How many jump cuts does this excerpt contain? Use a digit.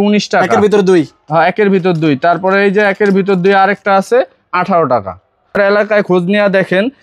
1